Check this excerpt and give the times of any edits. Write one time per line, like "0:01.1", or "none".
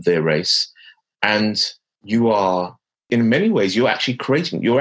0:00.9
0:03.1